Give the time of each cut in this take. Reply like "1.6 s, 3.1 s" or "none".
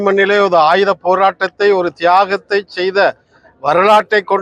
none